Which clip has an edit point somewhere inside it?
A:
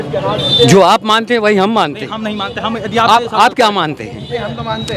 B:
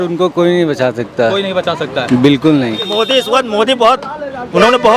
B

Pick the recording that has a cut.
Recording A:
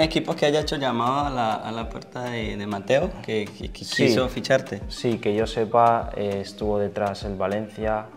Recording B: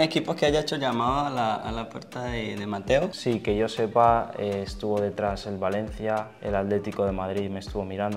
B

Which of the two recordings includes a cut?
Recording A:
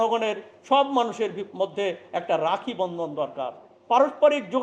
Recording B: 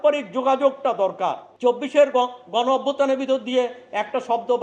B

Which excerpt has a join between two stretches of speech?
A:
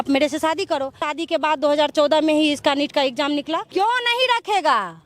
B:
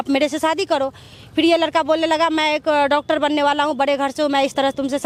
A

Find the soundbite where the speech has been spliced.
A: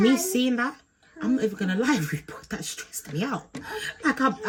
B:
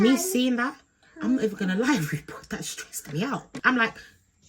B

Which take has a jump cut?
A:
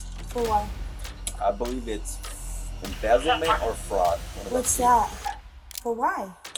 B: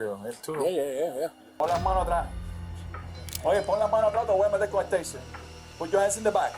B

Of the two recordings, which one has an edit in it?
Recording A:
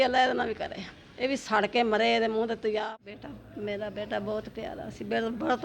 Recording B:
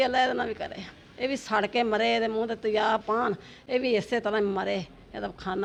A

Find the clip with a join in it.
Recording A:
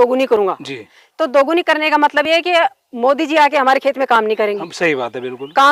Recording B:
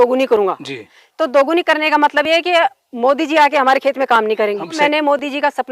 B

